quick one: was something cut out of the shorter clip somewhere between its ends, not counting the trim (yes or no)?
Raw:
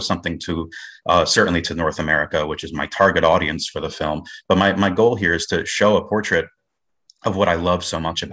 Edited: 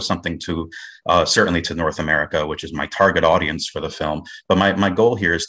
no